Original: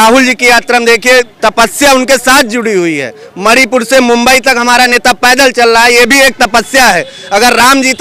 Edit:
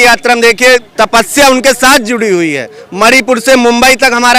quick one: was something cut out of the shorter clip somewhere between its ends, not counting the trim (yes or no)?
no